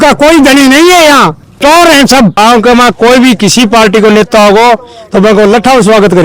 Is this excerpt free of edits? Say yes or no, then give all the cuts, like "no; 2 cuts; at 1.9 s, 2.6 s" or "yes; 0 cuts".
no; 1 cut; at 2.4 s